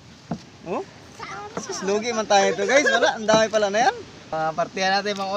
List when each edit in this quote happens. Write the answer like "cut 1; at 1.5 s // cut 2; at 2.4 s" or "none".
cut 1; at 4.3 s